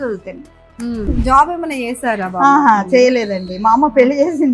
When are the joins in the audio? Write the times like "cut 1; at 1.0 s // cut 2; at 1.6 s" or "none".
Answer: cut 1; at 1.1 s